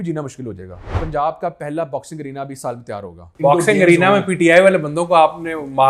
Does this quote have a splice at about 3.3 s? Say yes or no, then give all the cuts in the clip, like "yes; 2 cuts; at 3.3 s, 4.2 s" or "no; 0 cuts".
yes; 2 cuts; at 1.0 s, 3.3 s